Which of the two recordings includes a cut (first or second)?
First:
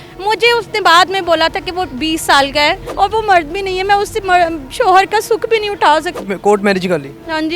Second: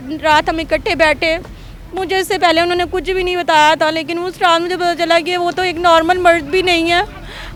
first